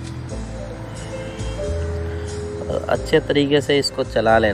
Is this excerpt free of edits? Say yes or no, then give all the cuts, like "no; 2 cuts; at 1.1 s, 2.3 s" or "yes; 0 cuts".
no; 1 cut; at 2.7 s